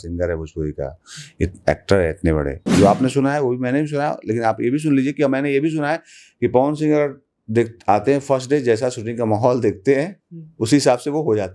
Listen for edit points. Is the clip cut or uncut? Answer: cut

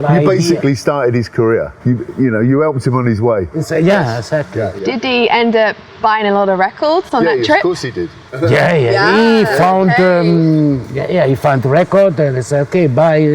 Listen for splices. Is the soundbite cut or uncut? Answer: uncut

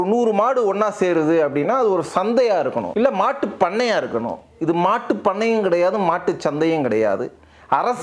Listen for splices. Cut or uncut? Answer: cut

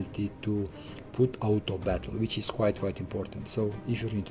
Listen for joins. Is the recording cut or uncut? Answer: uncut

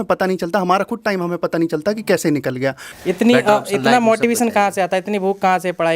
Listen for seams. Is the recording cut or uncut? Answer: cut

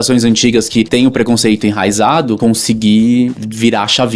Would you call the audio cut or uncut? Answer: cut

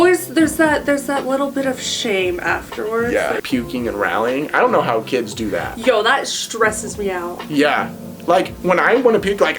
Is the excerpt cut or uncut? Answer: cut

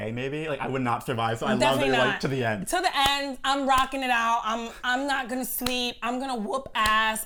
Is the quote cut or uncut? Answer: uncut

